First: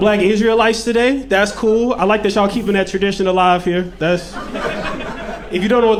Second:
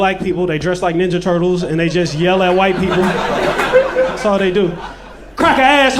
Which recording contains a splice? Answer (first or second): second